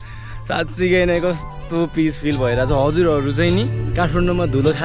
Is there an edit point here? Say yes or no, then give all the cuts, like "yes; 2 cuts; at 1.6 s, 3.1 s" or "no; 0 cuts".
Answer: yes; 1 cut; at 3.8 s